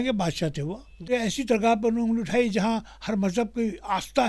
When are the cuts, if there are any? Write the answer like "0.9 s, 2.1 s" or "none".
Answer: 1.1 s